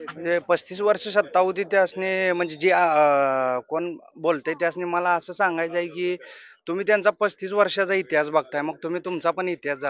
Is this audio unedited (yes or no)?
yes